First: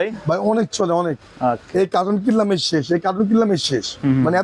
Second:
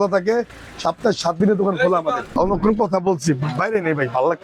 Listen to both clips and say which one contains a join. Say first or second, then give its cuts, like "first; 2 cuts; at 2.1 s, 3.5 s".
second; 1 cut; at 2.4 s